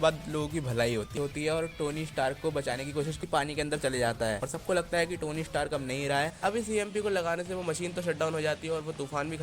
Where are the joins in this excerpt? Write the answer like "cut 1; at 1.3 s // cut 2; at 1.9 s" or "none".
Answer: cut 1; at 1.1 s // cut 2; at 3.2 s // cut 3; at 6.3 s